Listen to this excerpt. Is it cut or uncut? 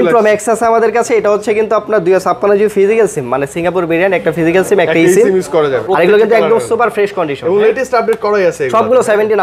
cut